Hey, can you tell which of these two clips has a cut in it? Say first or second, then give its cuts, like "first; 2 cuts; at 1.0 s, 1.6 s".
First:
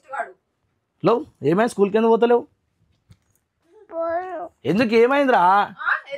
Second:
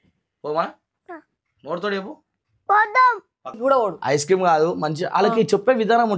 second; 1 cut; at 3.6 s